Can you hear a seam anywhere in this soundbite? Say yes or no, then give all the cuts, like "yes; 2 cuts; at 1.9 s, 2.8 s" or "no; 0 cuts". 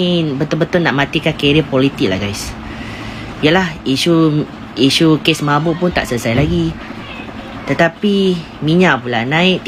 no; 0 cuts